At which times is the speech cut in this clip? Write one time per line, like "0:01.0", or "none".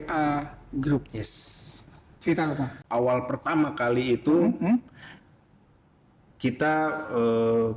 0:02.8